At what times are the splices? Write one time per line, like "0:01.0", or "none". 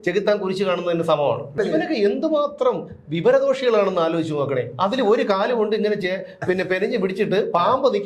0:01.6